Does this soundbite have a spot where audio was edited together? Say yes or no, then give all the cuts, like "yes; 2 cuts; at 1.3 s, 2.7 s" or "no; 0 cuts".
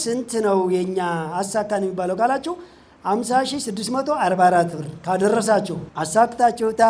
yes; 1 cut; at 5.8 s